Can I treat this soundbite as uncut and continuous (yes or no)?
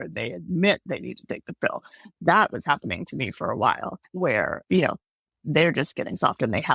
yes